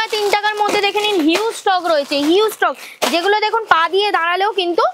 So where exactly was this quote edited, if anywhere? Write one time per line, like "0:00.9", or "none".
none